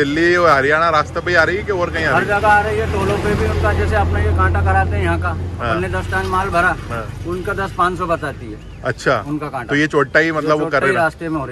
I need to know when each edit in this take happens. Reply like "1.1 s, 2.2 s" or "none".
none